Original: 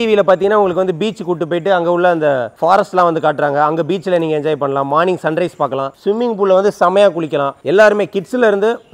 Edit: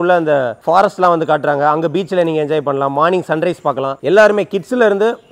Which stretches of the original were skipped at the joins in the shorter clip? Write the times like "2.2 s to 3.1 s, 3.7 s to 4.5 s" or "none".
5.9 s to 7.6 s